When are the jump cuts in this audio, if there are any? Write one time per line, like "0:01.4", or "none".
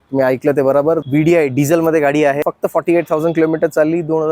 0:01.0
0:02.4